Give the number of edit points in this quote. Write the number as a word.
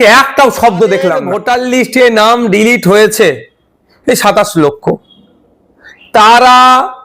one